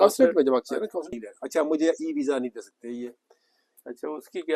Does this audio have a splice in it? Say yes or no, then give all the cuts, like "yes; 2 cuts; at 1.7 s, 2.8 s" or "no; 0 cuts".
yes; 1 cut; at 1.1 s